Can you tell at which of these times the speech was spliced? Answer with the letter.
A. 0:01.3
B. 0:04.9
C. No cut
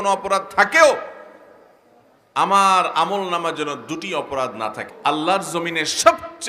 B